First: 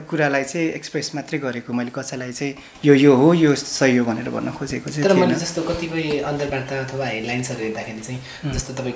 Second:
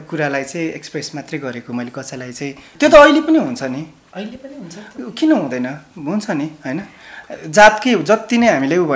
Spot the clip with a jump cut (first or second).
second